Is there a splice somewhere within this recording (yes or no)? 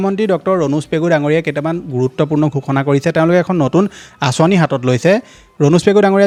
no